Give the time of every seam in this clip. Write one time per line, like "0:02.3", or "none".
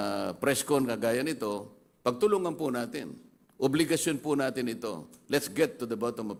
none